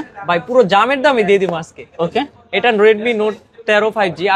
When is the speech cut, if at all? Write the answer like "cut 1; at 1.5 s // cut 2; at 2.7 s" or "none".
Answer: none

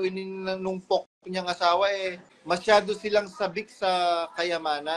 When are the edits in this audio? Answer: cut 1; at 2.3 s

